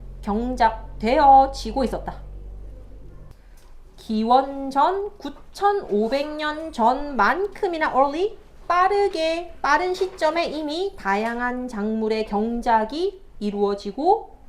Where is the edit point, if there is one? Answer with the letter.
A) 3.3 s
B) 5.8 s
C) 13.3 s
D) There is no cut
A